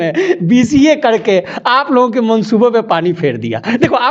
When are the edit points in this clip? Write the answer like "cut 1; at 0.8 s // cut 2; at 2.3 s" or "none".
none